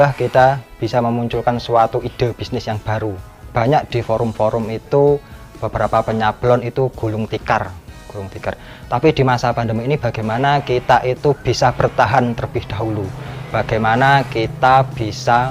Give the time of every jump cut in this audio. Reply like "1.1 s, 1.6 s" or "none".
3.4 s